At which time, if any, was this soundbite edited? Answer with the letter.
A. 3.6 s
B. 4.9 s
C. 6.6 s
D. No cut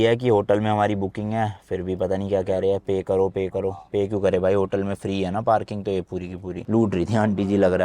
C